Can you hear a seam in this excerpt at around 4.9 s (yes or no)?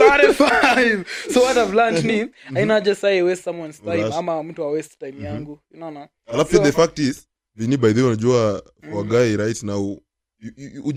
no